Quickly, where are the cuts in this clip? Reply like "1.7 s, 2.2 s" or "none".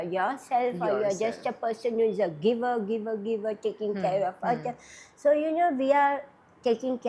none